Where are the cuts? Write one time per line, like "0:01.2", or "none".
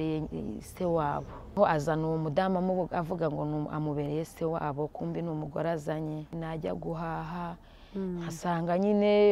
0:01.5
0:06.4